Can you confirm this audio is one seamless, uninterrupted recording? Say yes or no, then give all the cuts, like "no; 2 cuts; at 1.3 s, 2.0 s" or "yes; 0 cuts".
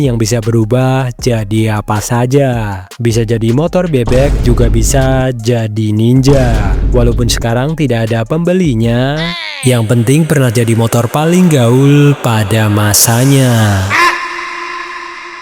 yes; 0 cuts